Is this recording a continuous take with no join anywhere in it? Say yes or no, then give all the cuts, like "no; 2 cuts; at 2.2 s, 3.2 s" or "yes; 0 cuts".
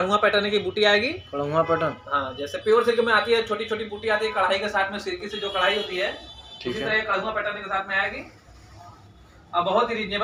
yes; 0 cuts